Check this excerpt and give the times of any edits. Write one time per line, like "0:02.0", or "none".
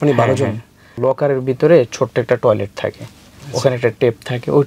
0:01.0